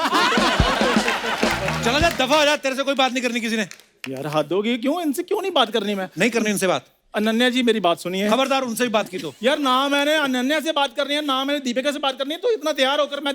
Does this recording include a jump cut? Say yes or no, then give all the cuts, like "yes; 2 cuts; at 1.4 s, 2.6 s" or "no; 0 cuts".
yes; 1 cut; at 1.8 s